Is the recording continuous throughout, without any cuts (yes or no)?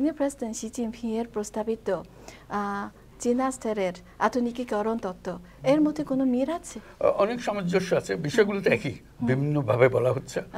yes